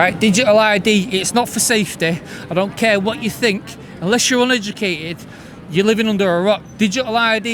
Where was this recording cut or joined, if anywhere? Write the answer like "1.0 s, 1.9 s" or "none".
none